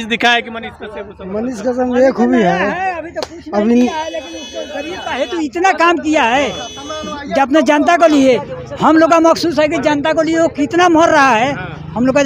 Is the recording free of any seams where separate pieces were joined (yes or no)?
yes